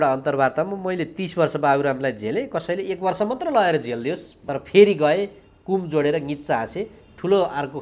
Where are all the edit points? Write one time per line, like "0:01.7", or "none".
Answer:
0:04.3